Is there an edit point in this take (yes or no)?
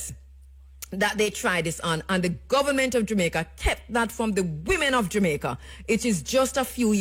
no